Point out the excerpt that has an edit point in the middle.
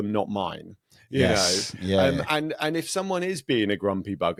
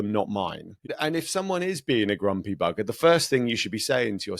second; 1 cut; at 0.9 s

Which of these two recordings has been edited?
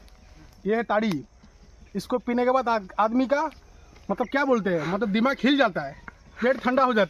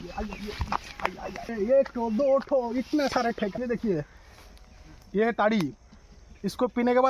second; 2 cuts; at 1.5 s, 3.5 s

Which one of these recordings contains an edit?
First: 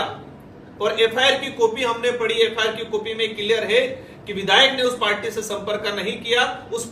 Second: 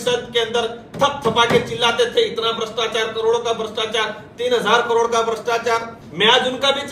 second; 1 cut; at 6.0 s

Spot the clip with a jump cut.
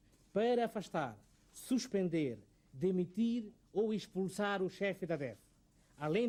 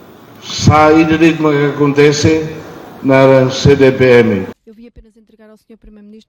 second; 1 cut; at 4.5 s

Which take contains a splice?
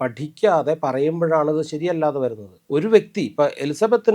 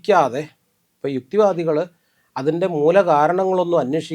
first; 1 cut; at 2.5 s

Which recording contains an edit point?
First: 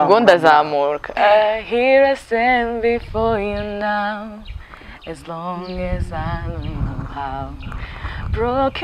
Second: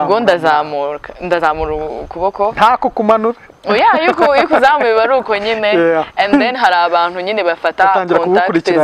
first; 1 cut; at 1.0 s

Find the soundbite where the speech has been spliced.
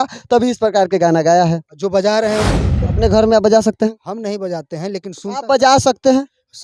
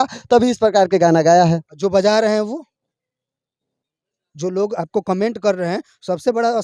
first; 1 cut; at 2.8 s

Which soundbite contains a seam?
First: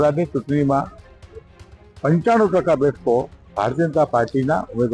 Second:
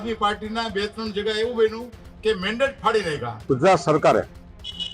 second; 1 cut; at 3.3 s

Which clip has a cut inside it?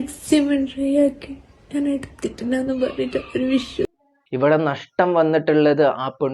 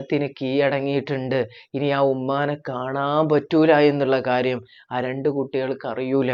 first; 1 cut; at 3.9 s

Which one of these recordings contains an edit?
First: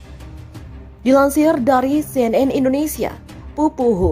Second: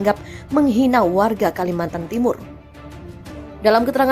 first; 1 cut; at 0.9 s

